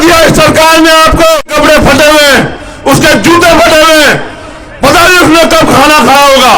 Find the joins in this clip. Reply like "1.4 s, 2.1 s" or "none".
1.4 s